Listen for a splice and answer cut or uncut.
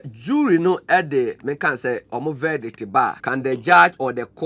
cut